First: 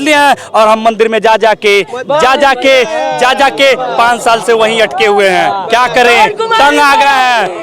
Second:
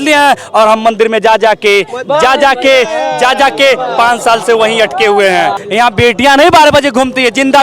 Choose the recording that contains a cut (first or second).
second